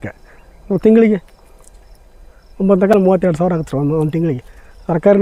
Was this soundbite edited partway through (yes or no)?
no